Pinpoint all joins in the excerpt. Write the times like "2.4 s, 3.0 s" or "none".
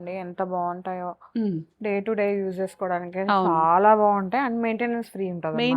none